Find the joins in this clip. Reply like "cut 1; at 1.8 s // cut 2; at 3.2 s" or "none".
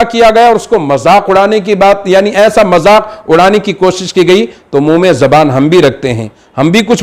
none